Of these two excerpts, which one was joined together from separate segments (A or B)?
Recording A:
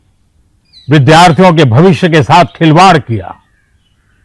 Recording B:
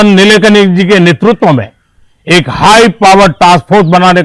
A